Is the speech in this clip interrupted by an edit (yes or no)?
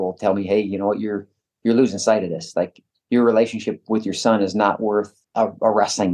yes